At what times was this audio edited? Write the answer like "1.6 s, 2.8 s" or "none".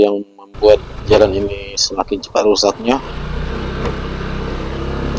none